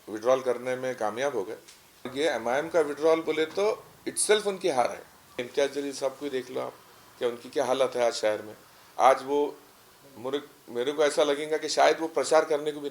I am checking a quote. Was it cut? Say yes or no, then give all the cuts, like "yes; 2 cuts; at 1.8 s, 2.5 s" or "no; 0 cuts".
yes; 2 cuts; at 2.1 s, 5.4 s